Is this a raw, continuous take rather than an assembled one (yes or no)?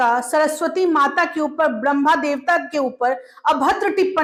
yes